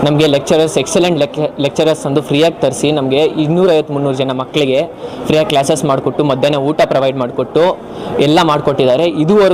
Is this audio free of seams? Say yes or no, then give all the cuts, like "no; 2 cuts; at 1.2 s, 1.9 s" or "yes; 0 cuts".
yes; 0 cuts